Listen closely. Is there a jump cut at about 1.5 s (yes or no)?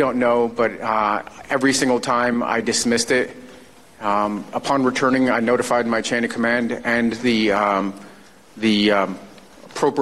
no